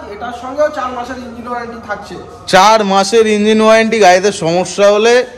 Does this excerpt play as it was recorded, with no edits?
yes; 0 cuts

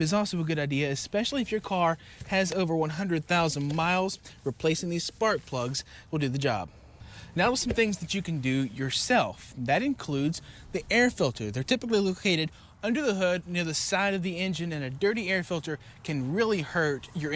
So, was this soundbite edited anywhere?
yes; 1 cut; at 7.0 s

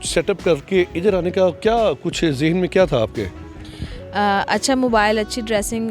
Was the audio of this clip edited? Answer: no; 0 cuts

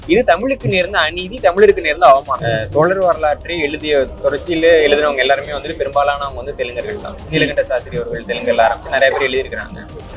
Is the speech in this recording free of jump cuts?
no; 1 cut; at 2.4 s

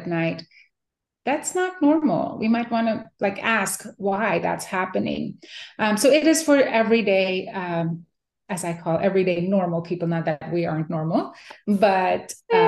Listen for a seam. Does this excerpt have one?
no; 0 cuts

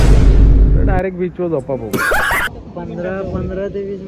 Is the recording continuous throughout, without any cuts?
no; 1 cut; at 2.4 s

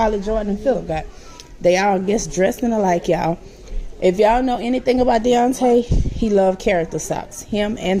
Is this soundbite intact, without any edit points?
yes; 0 cuts

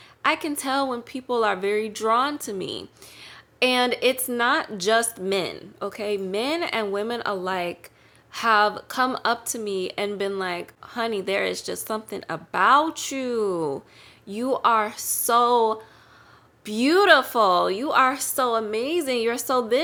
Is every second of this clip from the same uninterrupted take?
yes; 0 cuts

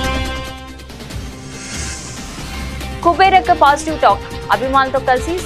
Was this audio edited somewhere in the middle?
no; 0 cuts

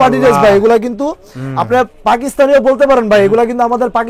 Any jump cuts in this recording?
no; 0 cuts

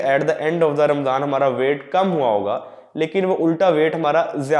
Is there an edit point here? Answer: no; 0 cuts

